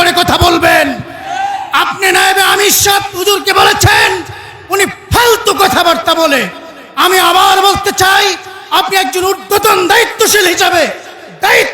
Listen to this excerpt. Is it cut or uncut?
uncut